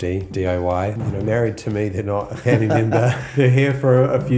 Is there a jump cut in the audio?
yes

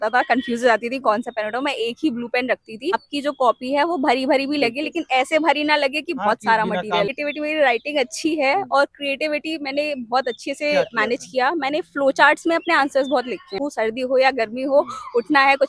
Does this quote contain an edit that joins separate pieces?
yes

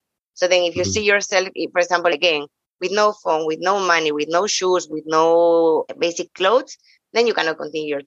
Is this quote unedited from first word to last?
no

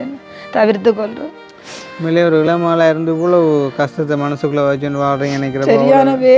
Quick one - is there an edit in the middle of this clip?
no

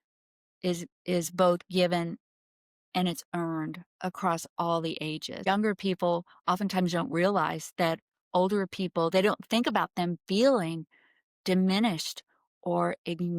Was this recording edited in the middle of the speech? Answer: yes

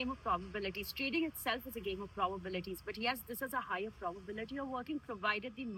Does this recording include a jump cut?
no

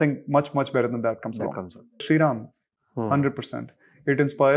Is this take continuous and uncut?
no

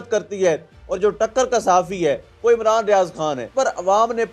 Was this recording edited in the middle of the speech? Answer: yes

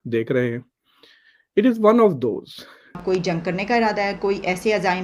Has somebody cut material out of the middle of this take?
yes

